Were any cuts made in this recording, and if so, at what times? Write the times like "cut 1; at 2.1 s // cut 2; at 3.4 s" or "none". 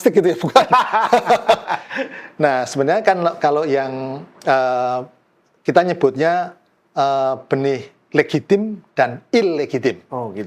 none